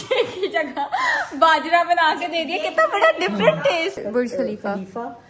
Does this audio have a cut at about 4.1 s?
yes; 1 cut; at 4.1 s

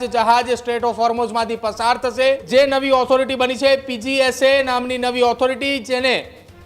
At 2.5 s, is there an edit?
yes; 1 cut; at 2.5 s

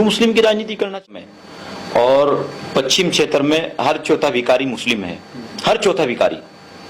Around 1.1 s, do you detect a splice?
yes; 1 cut; at 1.1 s

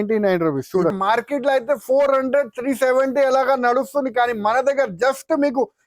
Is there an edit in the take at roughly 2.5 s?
no; 1 cut; at 1.0 s

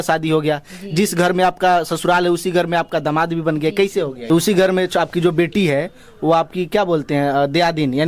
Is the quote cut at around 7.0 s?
no; 1 cut; at 4.2 s

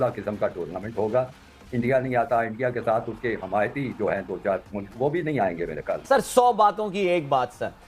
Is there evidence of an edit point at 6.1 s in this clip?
yes; 1 cut; at 6.1 s

